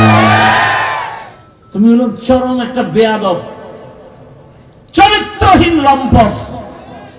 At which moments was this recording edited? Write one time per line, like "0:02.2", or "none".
0:01.0

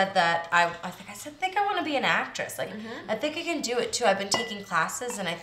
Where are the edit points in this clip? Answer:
none

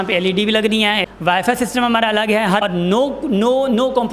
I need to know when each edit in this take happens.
0:01.0
0:02.6

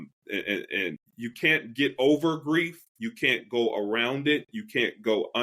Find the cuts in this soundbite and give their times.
0:01.1

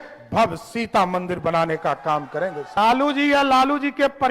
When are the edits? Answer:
0:02.8

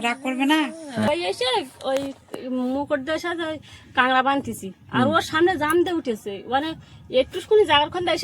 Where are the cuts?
0:01.1

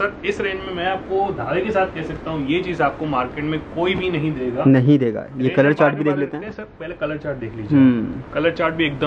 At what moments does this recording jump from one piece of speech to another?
none

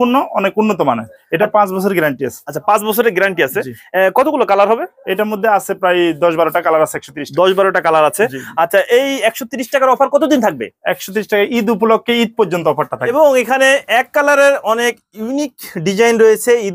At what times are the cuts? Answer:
0:13.0

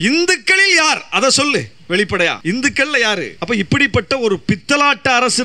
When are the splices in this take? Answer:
0:02.4
0:03.3

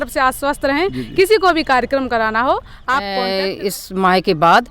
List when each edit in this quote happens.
0:03.1

